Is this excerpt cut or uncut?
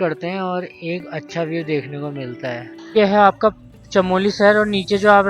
cut